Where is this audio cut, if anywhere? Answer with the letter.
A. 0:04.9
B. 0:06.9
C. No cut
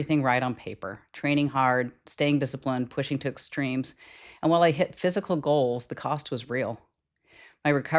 C